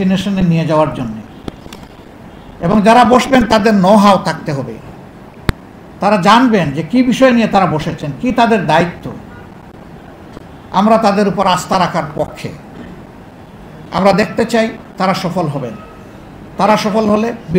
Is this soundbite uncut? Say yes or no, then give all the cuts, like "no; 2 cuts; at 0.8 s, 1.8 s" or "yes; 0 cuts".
yes; 0 cuts